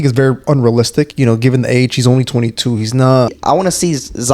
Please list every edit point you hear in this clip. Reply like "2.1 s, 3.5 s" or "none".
3.4 s

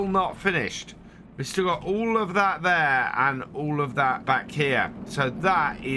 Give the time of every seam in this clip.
4.2 s

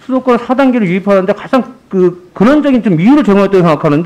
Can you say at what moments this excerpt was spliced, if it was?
none

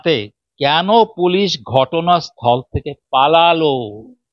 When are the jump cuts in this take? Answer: none

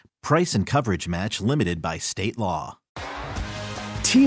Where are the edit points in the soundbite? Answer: none

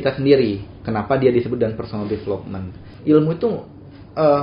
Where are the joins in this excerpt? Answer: 2.9 s

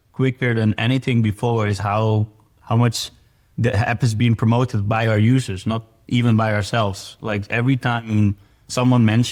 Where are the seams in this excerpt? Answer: none

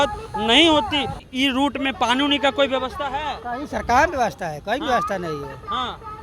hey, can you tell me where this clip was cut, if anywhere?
1.2 s

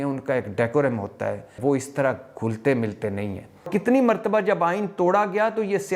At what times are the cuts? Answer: 1.5 s, 3.7 s

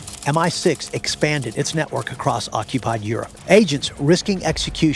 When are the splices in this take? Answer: 3.3 s

